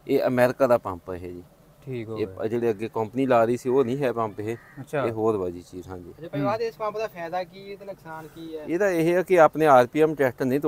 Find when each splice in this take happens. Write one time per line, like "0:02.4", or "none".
none